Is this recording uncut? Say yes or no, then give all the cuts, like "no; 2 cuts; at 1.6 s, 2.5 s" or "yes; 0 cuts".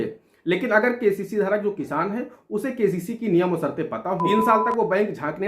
no; 1 cut; at 4.2 s